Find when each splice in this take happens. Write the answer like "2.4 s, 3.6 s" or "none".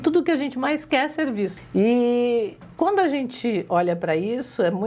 1.6 s

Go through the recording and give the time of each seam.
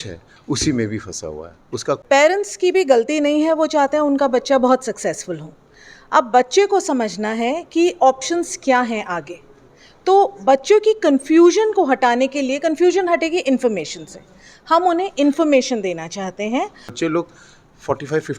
2.0 s, 16.9 s

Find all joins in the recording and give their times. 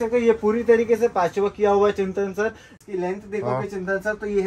2.8 s

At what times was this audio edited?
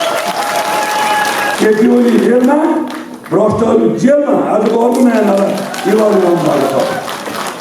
1.5 s

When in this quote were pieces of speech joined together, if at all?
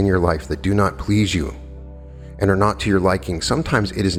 none

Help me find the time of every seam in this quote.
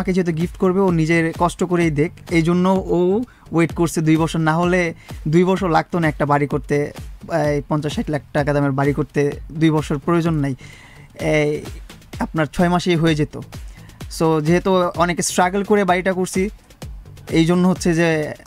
none

